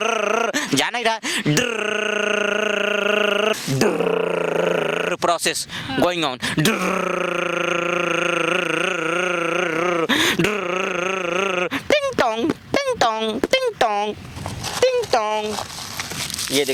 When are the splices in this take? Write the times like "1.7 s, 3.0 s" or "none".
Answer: 3.5 s